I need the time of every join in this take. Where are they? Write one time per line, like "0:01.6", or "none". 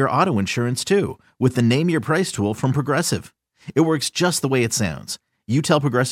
none